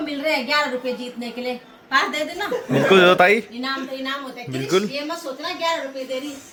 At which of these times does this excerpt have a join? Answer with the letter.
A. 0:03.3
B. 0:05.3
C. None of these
C